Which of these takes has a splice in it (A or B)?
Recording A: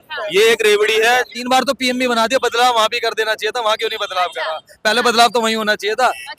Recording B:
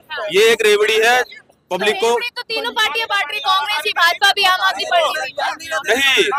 A